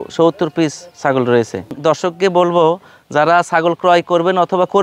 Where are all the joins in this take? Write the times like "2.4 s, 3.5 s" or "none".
1.8 s

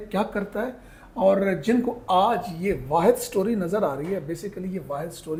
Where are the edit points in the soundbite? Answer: none

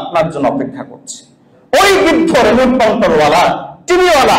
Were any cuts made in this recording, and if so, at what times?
none

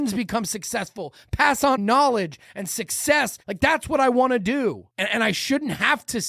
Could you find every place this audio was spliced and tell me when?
1.8 s, 3.4 s, 4.9 s

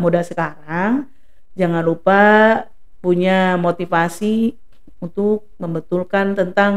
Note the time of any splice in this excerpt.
none

